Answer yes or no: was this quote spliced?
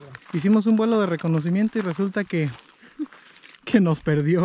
no